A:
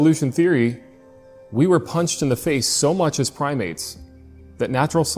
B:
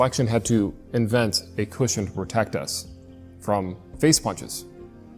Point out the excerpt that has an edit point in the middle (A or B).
B